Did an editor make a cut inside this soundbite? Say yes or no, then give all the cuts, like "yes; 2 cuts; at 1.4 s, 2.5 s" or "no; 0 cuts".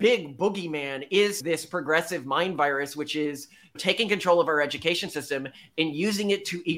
no; 0 cuts